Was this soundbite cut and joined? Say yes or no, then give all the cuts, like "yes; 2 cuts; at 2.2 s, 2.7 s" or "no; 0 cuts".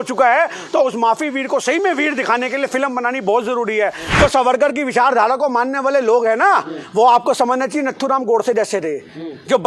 yes; 1 cut; at 4.0 s